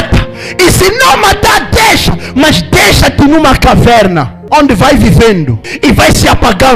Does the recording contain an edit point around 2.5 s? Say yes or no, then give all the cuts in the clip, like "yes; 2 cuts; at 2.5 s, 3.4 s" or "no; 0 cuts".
no; 2 cuts; at 4.3 s, 5.6 s